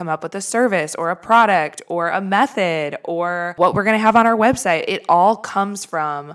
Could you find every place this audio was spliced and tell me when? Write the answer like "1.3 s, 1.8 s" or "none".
3.5 s